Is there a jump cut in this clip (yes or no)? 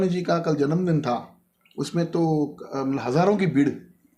no